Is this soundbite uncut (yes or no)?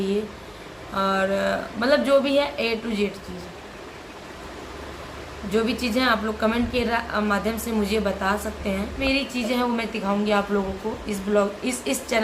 no